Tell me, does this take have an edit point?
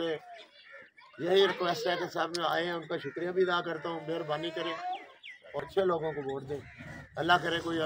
yes; 1 cut; at 5.6 s

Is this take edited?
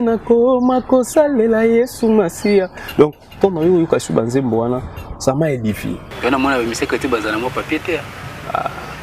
yes; 1 cut; at 6.1 s

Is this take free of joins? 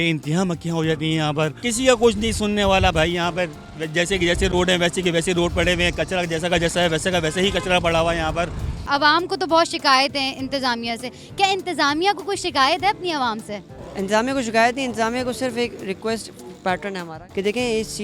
no; 3 cuts; at 1.6 s, 8.7 s, 17.1 s

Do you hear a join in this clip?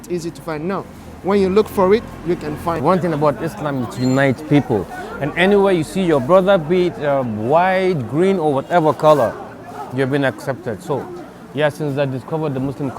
yes; 1 cut; at 2.8 s

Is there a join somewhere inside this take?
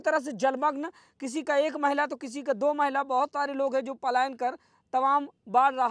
no; 0 cuts

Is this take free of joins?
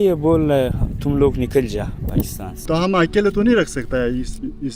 no; 1 cut; at 2.6 s

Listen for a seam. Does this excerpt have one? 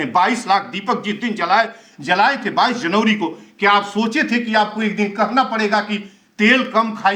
no; 0 cuts

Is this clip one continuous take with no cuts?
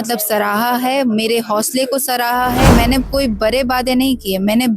no; 1 cut; at 2.7 s

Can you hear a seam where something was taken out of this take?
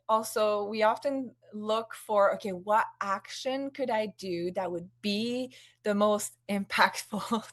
no; 0 cuts

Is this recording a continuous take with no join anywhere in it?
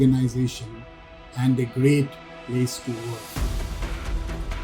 no; 1 cut; at 3.2 s

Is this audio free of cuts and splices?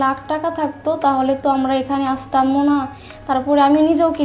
yes; 0 cuts

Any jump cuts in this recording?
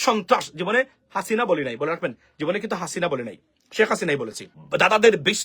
yes; 1 cut; at 4.5 s

